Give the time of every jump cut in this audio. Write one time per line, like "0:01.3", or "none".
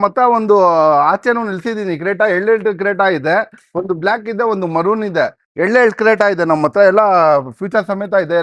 none